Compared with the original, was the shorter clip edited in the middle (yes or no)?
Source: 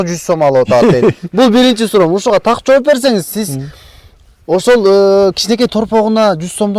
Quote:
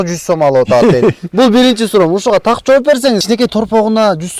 yes